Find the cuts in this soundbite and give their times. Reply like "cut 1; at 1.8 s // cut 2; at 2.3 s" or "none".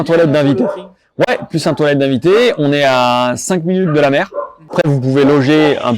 cut 1; at 4.7 s